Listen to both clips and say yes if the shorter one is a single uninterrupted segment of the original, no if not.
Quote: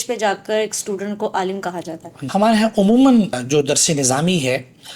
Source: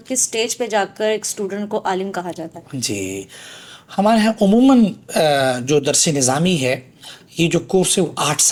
no